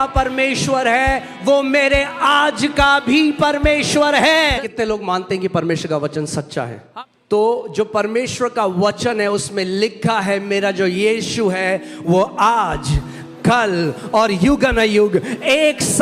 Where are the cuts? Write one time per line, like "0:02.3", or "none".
0:04.5
0:06.8